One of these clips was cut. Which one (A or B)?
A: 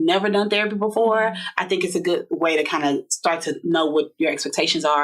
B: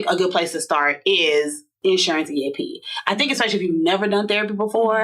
B